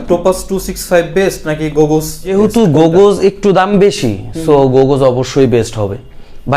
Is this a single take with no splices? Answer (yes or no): no